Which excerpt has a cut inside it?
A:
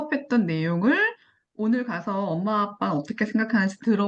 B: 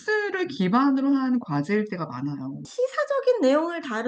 B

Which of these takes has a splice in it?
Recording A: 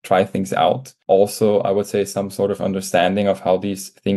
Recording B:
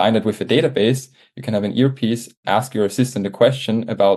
A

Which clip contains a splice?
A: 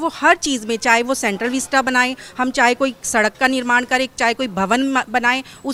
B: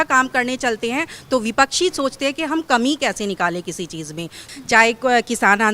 B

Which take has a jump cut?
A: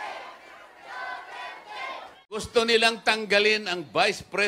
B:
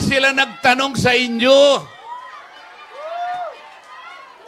A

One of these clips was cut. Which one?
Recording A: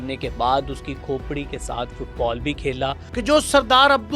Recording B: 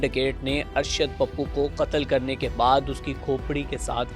A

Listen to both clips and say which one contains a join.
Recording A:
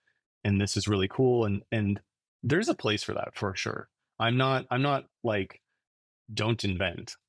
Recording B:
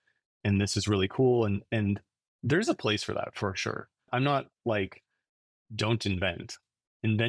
B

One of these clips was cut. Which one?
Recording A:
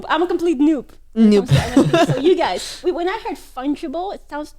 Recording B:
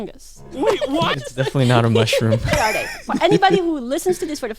B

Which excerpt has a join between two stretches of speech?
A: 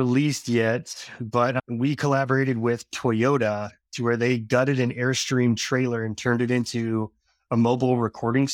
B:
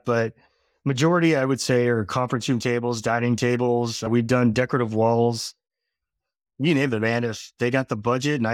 B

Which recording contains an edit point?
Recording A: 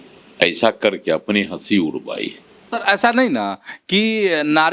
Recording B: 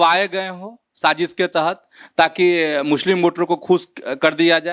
A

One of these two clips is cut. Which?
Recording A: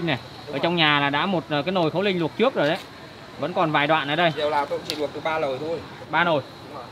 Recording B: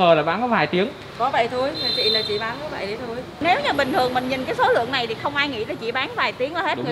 B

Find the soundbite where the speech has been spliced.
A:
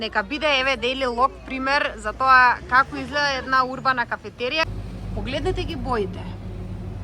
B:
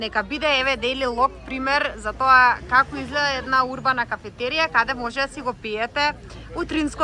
A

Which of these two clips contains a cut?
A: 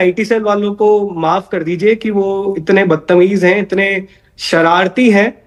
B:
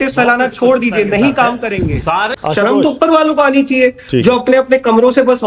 B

